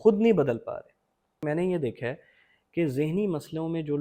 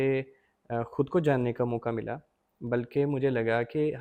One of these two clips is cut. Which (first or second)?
first